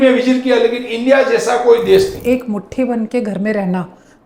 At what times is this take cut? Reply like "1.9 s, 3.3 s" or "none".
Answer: 2.2 s